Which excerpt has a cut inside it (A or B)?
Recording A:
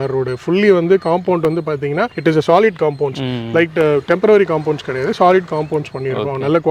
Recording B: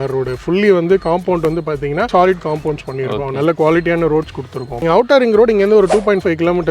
B